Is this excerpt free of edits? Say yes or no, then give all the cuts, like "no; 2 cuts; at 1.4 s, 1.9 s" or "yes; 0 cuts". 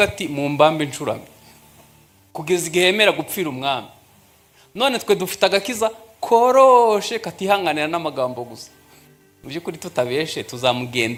yes; 0 cuts